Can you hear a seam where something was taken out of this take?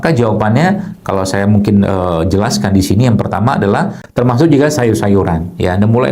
yes; 1 cut; at 4.0 s

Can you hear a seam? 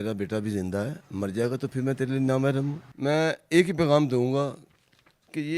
yes; 1 cut; at 2.8 s

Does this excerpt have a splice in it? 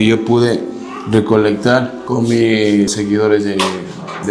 yes; 2 cuts; at 2.0 s, 2.9 s

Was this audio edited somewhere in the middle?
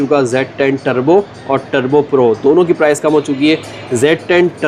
no; 0 cuts

